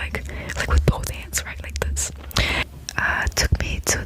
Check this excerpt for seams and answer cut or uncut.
cut